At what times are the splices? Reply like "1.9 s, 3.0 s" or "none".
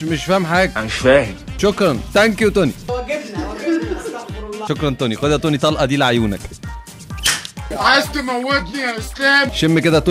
none

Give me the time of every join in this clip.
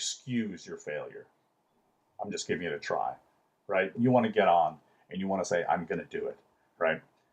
3.9 s

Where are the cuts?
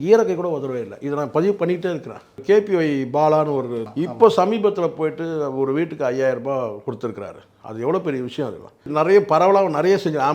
2.4 s, 3.8 s, 8.9 s

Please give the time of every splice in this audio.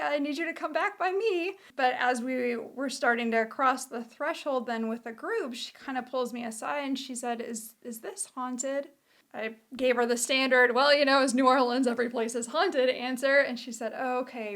1.7 s

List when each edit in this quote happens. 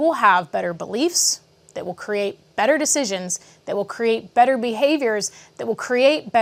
none

